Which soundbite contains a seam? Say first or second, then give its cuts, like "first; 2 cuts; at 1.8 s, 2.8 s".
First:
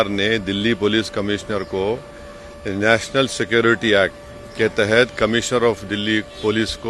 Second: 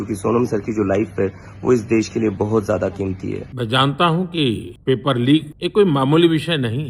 second; 3 cuts; at 3.5 s, 4.7 s, 5.5 s